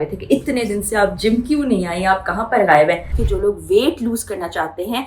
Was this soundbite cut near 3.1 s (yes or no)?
yes